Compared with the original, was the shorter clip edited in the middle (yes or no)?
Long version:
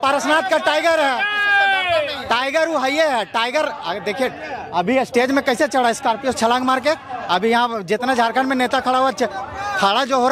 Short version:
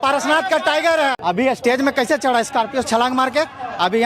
yes